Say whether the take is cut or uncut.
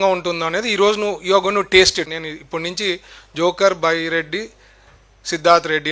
cut